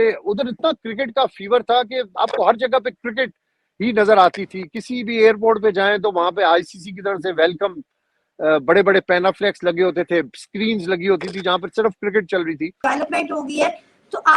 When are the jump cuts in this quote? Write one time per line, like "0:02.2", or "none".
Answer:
none

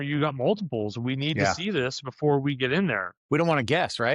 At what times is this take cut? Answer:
0:03.1

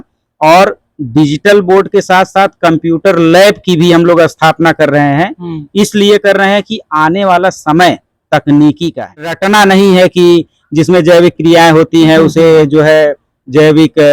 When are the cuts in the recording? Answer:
0:09.4

